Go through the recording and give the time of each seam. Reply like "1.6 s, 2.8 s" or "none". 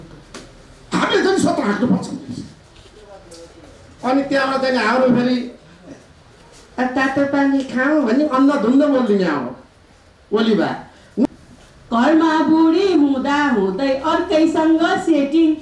11.3 s

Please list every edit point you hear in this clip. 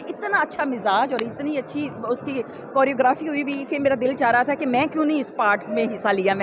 none

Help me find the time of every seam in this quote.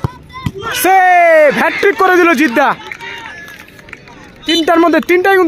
1.1 s

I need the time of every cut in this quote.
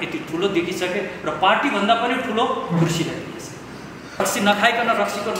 4.2 s

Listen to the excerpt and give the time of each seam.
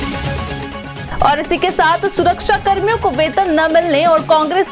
none

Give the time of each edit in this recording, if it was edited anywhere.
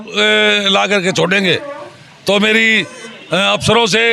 none

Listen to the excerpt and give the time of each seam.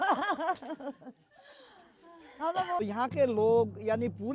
2.8 s

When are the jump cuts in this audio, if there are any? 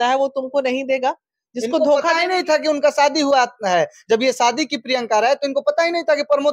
none

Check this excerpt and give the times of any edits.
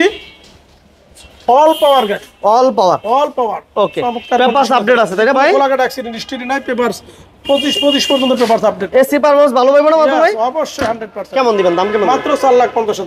none

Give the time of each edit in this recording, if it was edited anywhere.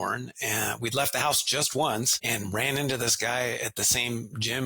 2.2 s

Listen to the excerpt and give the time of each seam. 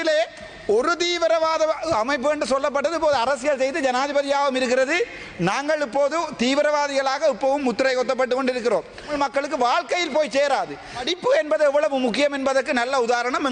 9.1 s, 11.1 s

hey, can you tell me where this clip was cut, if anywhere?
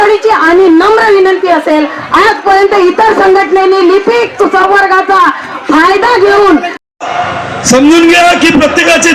7.0 s

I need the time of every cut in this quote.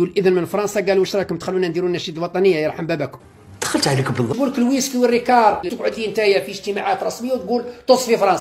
4.3 s, 5.7 s

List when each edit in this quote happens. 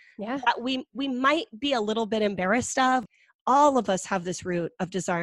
3.1 s

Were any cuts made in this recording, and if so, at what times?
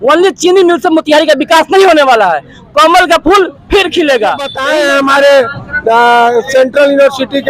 4.6 s

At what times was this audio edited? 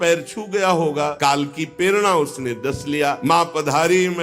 1.1 s, 3.2 s

